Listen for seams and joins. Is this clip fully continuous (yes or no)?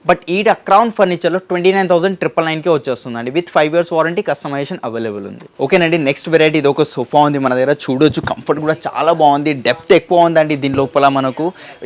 yes